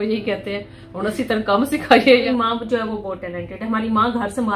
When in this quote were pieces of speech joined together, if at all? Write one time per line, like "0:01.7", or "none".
0:02.3